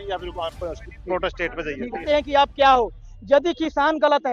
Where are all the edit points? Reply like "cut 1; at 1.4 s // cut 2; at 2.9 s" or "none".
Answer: cut 1; at 2.0 s